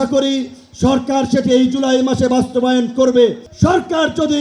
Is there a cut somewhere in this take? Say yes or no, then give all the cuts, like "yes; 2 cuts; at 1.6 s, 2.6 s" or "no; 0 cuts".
yes; 1 cut; at 3.5 s